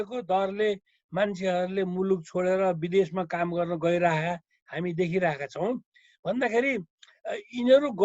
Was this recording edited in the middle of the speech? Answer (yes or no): no